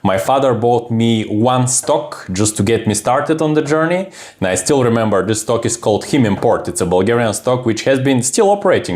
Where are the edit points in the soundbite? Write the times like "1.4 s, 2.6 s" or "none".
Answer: none